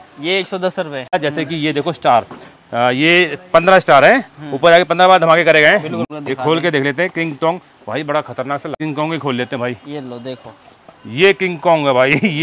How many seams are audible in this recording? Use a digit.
3